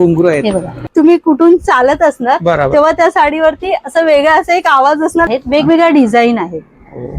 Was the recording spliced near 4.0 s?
no; 2 cuts; at 0.8 s, 5.3 s

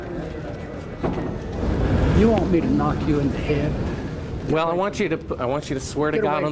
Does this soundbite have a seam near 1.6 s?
yes; 1 cut; at 1.6 s

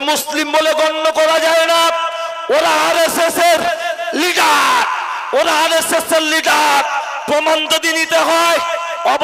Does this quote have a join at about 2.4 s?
no; 0 cuts

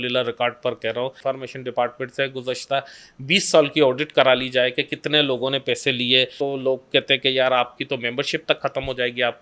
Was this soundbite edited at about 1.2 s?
yes; 2 cuts; at 1.2 s, 6.4 s

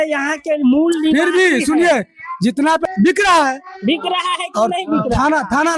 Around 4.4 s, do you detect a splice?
no; 1 cut; at 2.8 s

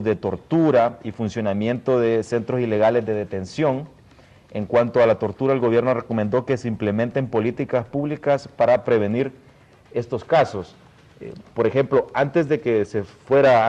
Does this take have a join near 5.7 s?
no; 1 cut; at 11.6 s

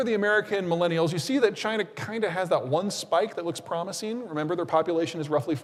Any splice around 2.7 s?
no; 0 cuts

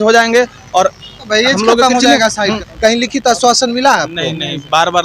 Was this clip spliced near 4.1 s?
no; 1 cut; at 2.6 s

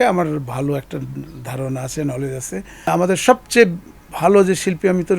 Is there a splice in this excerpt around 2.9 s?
yes; 1 cut; at 2.9 s

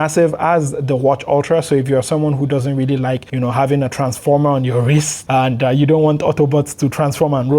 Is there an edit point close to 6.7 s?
no; 2 cuts; at 3.3 s, 5.2 s

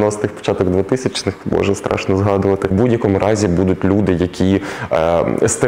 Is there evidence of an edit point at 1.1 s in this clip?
no; 1 cut; at 2.7 s

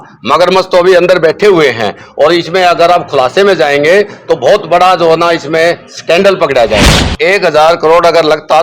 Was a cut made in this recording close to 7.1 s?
yes; 1 cut; at 7.1 s

